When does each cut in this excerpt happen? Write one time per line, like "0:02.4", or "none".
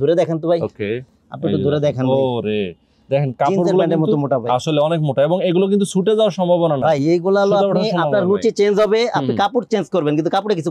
none